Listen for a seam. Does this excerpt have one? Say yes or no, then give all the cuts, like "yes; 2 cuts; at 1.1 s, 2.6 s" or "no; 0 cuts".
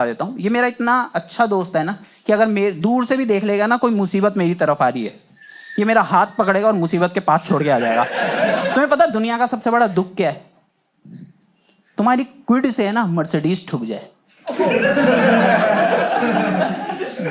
yes; 1 cut; at 8.7 s